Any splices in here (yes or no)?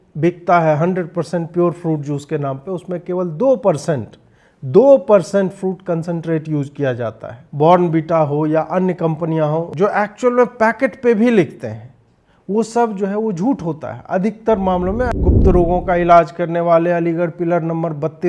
yes